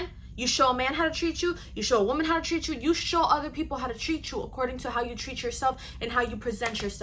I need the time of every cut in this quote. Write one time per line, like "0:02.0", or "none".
none